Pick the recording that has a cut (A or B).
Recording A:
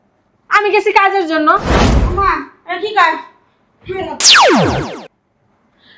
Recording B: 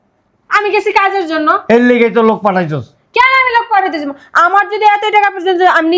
A